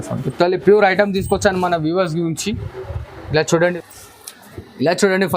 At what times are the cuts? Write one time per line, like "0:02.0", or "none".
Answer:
0:03.8